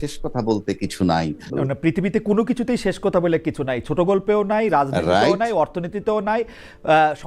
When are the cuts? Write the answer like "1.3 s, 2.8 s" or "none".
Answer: 1.5 s